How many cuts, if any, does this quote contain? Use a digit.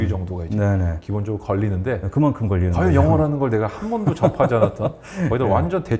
0